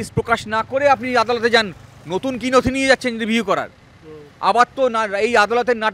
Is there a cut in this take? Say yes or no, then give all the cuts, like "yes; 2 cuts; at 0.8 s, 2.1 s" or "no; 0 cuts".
no; 0 cuts